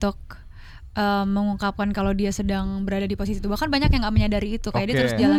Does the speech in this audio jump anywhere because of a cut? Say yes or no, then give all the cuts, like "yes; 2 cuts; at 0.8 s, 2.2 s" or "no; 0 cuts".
no; 0 cuts